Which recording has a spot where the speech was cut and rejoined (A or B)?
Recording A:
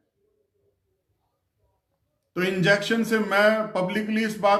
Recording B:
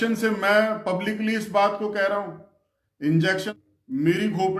B